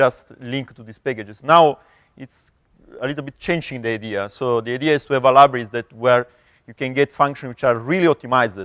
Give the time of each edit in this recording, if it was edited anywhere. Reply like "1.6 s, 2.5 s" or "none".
6.9 s